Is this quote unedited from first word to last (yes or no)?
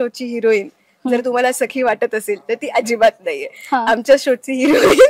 yes